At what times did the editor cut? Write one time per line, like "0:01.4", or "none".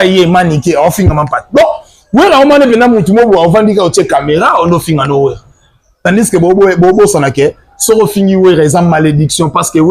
none